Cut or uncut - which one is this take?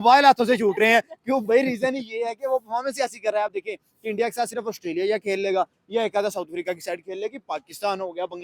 uncut